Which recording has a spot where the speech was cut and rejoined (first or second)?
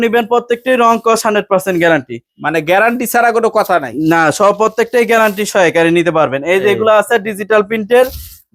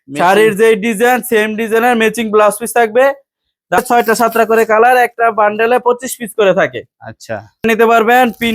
second